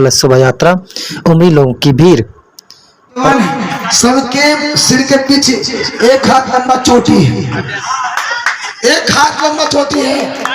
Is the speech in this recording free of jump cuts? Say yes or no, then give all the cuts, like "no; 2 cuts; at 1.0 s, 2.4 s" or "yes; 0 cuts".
no; 1 cut; at 3.2 s